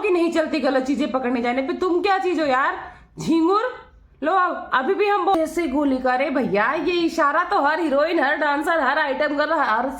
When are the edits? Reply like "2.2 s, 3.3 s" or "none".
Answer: 5.3 s